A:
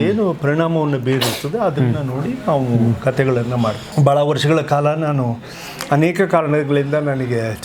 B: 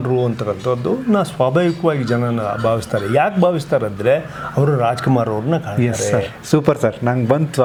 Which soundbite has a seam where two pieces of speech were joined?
A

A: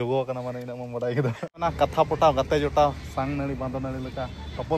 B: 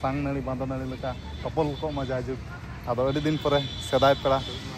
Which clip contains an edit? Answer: A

